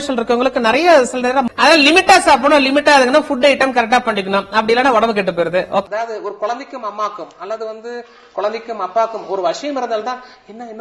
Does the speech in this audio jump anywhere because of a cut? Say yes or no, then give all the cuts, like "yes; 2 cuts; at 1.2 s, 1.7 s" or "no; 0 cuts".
yes; 2 cuts; at 1.5 s, 5.9 s